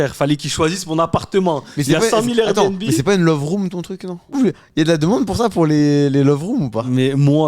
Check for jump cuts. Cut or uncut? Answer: cut